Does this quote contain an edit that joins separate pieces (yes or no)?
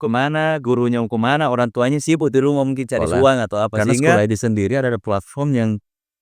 yes